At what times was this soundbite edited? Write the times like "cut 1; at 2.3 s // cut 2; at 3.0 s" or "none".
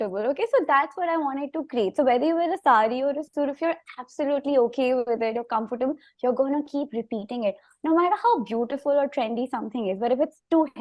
none